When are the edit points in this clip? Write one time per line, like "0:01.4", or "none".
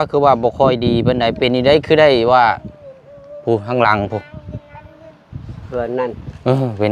none